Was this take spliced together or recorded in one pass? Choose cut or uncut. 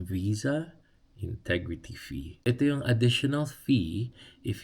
cut